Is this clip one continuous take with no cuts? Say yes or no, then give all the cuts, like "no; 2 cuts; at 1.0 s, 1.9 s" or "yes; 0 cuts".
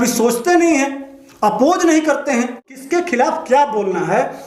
no; 1 cut; at 2.8 s